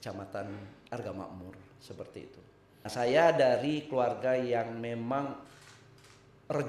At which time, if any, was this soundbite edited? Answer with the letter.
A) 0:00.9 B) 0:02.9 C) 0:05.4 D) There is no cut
B